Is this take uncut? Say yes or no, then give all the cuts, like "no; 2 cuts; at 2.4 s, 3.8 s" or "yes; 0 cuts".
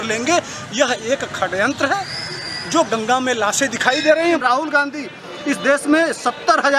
no; 1 cut; at 4.4 s